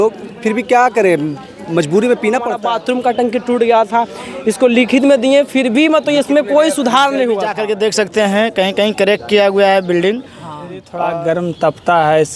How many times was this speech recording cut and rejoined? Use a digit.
3